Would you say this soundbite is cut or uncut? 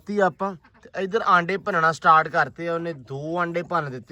uncut